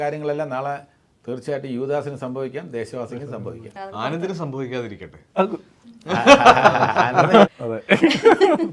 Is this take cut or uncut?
uncut